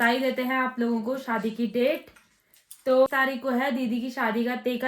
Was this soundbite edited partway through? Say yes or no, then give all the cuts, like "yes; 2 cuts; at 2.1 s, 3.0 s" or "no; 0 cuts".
yes; 1 cut; at 3.1 s